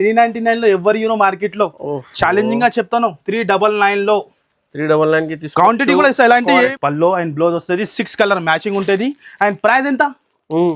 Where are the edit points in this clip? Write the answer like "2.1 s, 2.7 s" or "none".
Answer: 6.7 s